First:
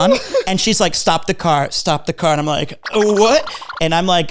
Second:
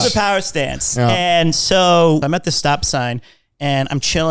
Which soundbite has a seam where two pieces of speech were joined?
second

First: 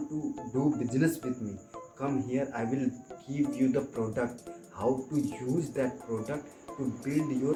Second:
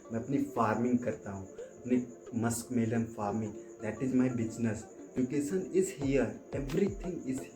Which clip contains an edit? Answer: second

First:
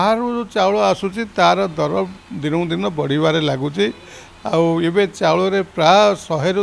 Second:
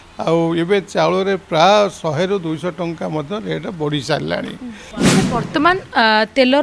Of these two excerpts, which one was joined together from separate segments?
second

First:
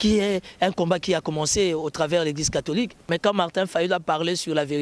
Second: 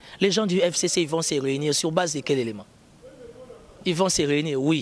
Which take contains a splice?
first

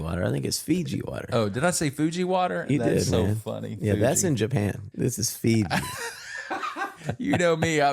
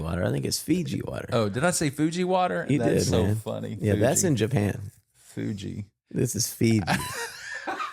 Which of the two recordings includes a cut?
first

